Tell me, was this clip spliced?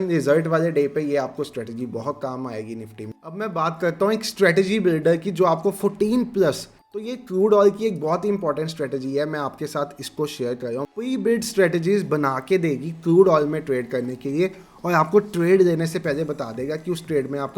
yes; 3 cuts; at 3.2 s, 6.7 s, 10.9 s

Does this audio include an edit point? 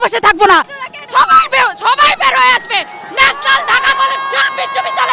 no; 0 cuts

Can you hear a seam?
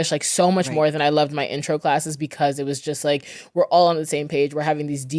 no; 0 cuts

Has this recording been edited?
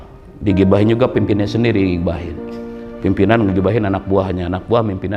no; 0 cuts

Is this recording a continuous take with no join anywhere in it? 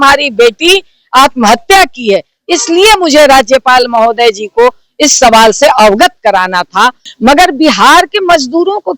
no; 1 cut; at 7.0 s

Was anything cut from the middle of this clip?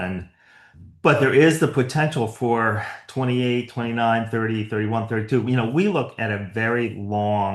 no; 0 cuts

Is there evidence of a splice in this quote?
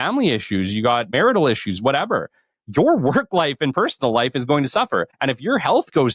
yes; 2 cuts; at 1.1 s, 5.1 s

